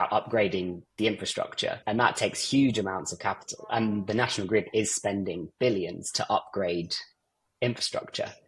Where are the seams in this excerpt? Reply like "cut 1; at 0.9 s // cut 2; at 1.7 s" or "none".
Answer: none

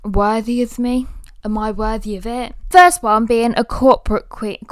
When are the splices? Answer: none

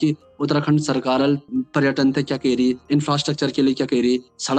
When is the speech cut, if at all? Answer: cut 1; at 1.4 s // cut 2; at 2.8 s

